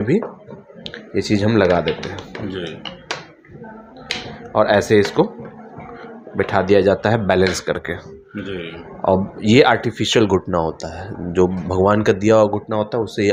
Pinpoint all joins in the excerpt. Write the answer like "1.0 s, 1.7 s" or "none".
none